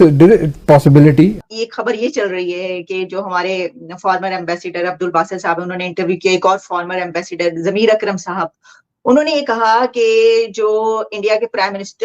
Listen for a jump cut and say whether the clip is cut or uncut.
cut